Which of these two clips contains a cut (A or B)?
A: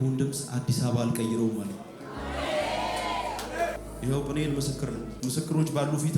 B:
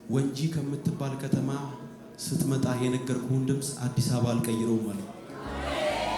A